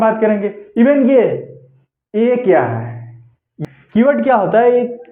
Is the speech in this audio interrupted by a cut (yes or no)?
yes